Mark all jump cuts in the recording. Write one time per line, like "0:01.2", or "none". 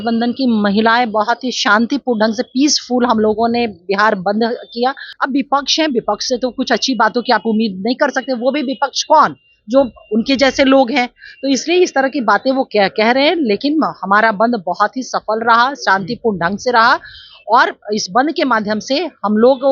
0:05.1